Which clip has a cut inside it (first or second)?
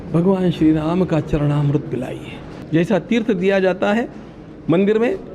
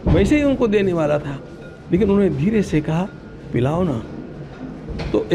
first